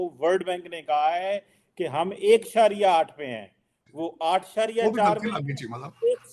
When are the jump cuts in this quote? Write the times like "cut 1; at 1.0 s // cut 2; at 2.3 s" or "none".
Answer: none